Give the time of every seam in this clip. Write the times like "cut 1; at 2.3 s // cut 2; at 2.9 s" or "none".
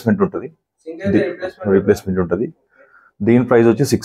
none